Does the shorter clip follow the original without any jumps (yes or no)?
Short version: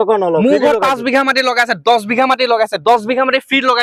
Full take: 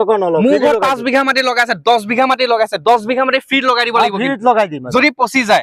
yes